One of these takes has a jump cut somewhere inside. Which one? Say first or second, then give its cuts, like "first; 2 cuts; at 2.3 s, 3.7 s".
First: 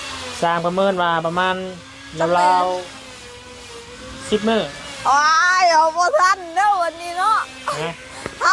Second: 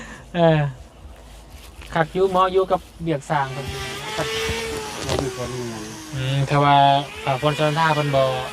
second; 1 cut; at 3.8 s